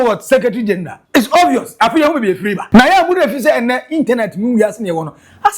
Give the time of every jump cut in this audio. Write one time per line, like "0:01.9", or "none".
0:01.0
0:02.6